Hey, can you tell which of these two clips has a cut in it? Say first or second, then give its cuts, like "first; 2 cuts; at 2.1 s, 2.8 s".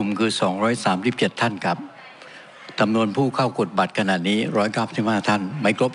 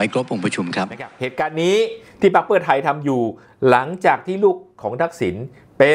second; 1 cut; at 1.2 s